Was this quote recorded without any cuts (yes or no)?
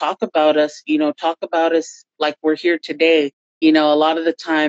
no